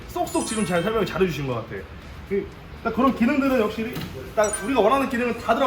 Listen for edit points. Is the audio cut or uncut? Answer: uncut